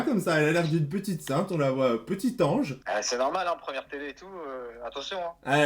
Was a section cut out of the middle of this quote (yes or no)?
no